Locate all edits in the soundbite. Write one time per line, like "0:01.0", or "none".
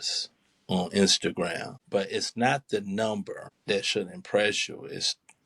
0:01.7
0:03.5